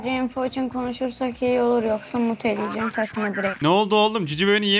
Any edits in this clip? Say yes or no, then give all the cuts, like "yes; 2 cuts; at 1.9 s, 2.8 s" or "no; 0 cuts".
no; 0 cuts